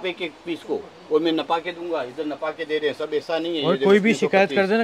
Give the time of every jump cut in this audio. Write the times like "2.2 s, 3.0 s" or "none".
none